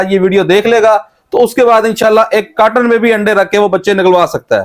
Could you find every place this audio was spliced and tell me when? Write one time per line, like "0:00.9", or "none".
none